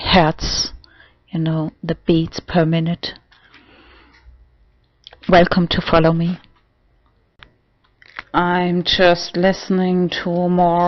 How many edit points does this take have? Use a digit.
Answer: 1